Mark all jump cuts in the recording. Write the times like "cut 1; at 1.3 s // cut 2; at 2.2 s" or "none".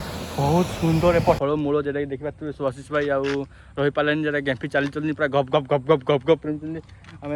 cut 1; at 1.4 s